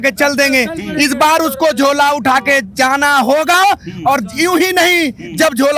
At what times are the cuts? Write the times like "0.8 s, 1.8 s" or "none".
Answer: none